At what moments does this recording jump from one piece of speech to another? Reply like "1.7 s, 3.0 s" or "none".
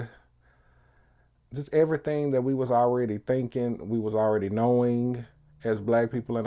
none